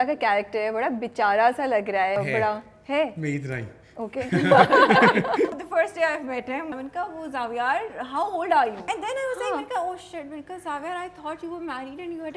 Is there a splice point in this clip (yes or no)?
yes